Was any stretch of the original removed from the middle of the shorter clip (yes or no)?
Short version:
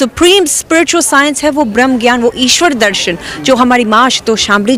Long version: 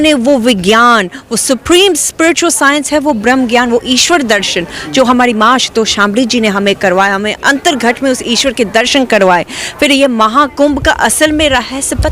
no